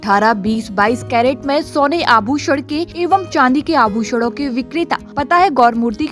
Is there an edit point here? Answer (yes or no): yes